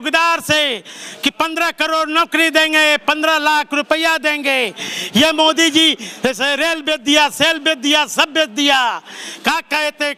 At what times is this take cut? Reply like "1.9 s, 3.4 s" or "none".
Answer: none